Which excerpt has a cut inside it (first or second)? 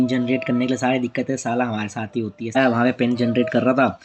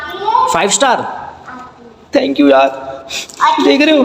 first